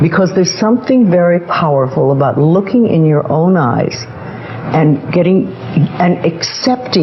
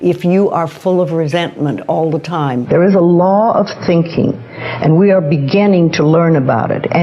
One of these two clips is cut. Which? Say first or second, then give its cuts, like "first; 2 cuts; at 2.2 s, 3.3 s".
second; 1 cut; at 2.6 s